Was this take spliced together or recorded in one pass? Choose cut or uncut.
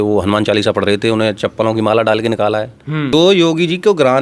cut